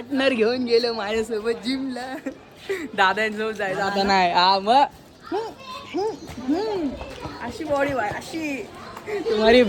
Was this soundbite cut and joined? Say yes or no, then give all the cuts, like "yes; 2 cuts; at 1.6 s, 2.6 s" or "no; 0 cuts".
no; 0 cuts